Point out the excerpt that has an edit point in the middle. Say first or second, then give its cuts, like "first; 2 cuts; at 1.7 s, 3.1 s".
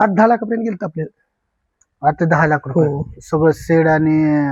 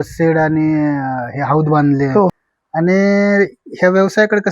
second; 1 cut; at 2.3 s